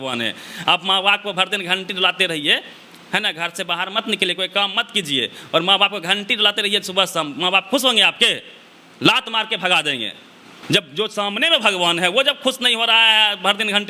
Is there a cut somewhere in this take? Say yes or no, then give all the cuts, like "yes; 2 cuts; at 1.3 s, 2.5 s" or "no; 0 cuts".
no; 0 cuts